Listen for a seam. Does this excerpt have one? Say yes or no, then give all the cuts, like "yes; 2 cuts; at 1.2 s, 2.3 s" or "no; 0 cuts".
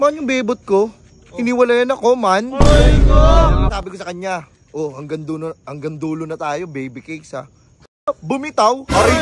yes; 1 cut; at 3.7 s